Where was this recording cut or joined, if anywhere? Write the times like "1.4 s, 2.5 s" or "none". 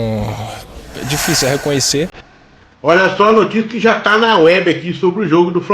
2.2 s